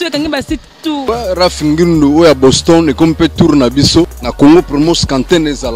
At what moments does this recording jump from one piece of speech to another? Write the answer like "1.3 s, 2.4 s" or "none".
1.0 s, 4.2 s